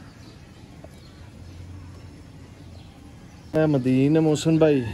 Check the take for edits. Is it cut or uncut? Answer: cut